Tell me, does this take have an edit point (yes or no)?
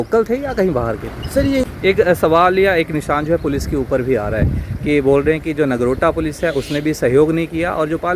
yes